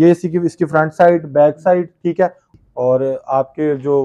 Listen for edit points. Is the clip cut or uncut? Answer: cut